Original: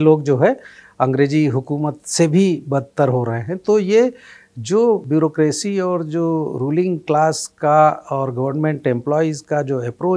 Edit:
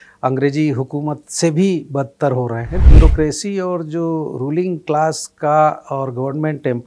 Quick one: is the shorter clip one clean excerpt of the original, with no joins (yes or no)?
no